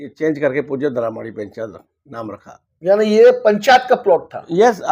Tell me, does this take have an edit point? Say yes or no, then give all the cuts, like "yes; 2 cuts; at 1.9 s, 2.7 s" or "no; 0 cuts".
no; 0 cuts